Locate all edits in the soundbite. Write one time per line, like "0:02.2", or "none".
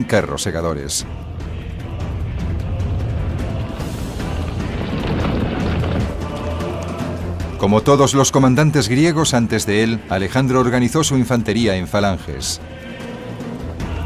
none